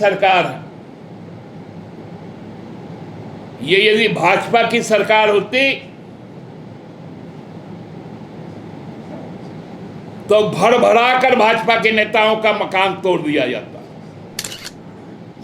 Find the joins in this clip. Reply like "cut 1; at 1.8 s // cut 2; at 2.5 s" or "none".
cut 1; at 14.5 s